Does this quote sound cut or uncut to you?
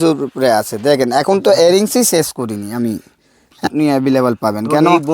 cut